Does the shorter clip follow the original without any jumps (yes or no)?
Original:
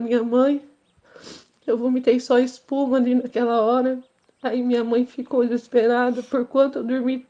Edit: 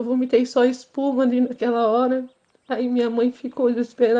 yes